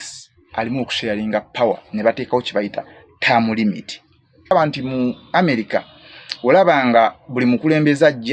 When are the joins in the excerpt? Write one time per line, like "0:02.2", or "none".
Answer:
0:04.5